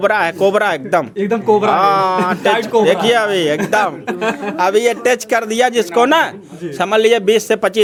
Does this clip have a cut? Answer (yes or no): no